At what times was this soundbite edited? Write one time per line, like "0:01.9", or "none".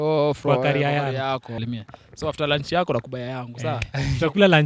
0:01.5